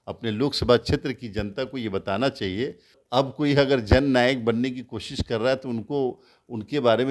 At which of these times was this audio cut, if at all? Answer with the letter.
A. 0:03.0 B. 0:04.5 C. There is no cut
A